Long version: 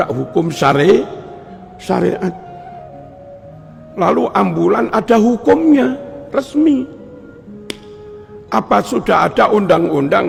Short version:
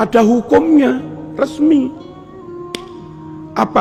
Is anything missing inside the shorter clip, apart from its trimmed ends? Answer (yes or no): no